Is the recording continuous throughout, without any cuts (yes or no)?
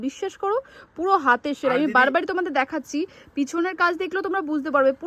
yes